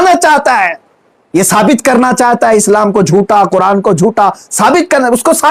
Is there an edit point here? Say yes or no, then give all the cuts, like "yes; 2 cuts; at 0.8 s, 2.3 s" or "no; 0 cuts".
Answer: no; 0 cuts